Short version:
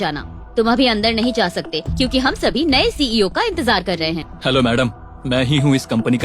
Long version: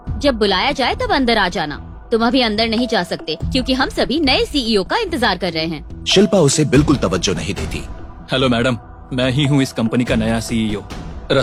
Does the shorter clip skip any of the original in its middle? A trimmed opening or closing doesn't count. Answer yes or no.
yes